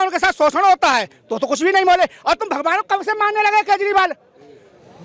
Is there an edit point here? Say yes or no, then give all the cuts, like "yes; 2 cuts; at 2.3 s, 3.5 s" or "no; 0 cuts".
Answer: no; 0 cuts